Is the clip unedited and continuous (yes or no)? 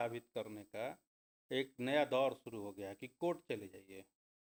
yes